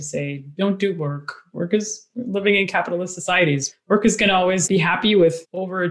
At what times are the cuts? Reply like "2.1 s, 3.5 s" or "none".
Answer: none

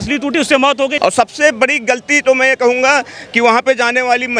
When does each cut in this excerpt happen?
1.0 s

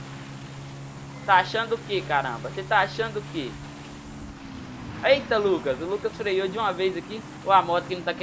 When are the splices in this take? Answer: none

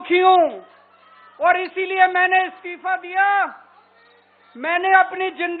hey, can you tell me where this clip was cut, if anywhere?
none

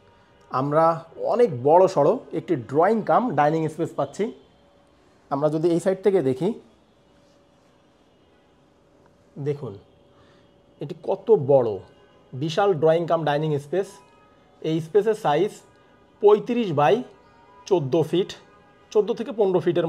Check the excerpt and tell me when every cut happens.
none

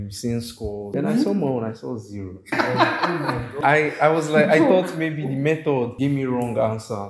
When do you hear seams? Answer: 0.9 s, 2.5 s, 3.6 s, 5.9 s

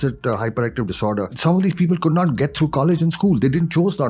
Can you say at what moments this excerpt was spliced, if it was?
1.3 s

